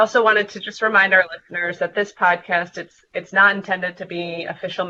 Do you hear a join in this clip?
no; 0 cuts

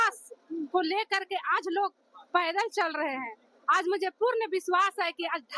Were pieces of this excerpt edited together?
no; 0 cuts

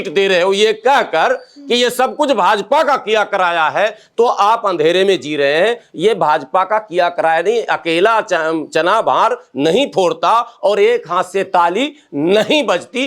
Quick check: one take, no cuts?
yes; 0 cuts

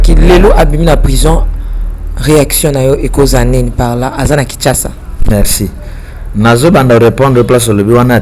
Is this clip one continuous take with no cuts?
yes; 0 cuts

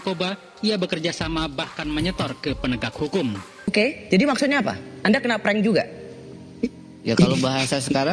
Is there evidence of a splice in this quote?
yes; 1 cut; at 3.7 s

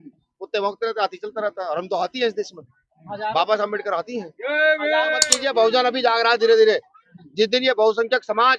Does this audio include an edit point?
yes; 1 cut; at 5.3 s

